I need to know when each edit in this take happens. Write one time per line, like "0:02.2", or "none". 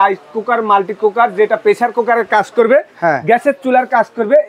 none